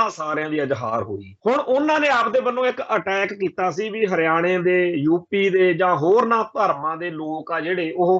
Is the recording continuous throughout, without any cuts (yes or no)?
no